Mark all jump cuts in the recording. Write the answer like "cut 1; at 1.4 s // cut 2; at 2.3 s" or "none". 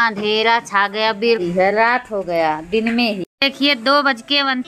cut 1; at 1.4 s